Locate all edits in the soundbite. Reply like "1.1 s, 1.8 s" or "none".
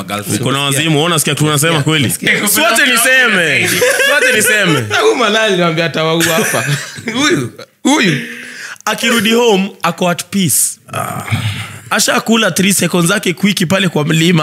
2.3 s